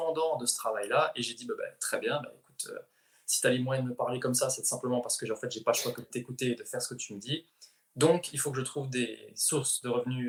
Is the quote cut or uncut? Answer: uncut